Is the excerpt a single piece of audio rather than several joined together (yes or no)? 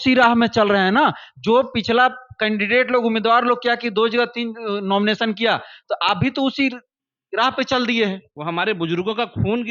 no